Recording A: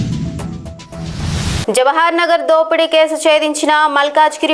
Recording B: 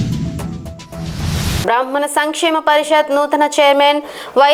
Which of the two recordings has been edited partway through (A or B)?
A